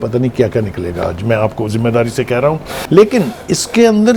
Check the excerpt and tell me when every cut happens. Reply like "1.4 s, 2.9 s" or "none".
2.7 s